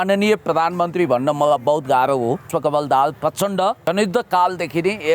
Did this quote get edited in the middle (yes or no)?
yes